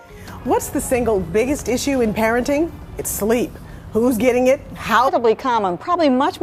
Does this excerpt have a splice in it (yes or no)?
no